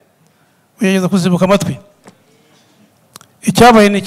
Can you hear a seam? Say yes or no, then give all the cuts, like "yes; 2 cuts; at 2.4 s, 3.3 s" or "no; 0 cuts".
yes; 1 cut; at 2.9 s